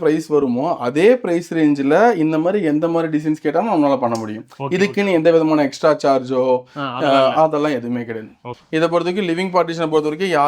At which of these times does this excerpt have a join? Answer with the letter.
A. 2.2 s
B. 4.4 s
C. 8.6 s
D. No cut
C